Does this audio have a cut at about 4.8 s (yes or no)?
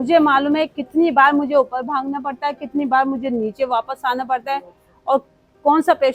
no